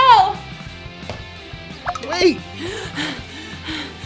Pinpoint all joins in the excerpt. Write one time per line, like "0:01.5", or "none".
0:02.6